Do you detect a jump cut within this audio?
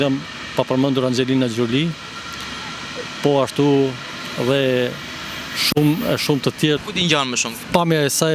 yes; 1 cut; at 6.8 s

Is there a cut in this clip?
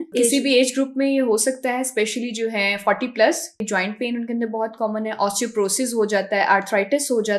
yes; 1 cut; at 3.6 s

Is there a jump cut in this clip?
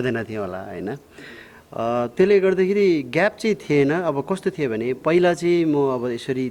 no; 0 cuts

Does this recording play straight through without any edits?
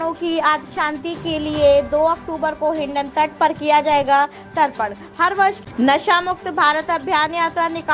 no; 1 cut; at 5.6 s

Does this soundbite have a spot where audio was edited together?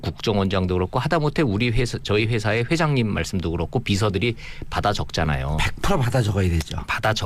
no; 0 cuts

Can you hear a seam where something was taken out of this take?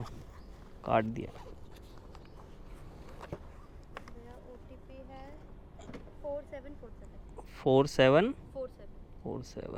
no; 0 cuts

